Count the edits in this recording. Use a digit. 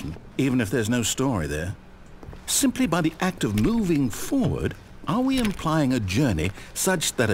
1